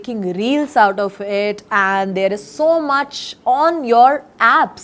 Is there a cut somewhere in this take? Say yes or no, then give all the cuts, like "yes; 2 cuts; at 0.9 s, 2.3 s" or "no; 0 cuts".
no; 0 cuts